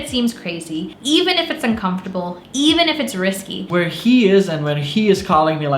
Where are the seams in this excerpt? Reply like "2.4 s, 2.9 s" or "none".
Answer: 0.9 s, 2.4 s, 3.6 s